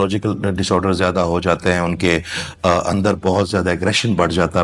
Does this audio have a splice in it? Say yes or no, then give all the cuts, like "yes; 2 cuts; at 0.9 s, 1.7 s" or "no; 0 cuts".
no; 0 cuts